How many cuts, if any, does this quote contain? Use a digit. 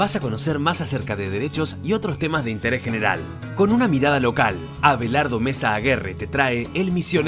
0